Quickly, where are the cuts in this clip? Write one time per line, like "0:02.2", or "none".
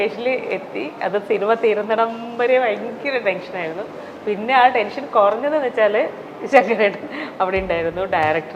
none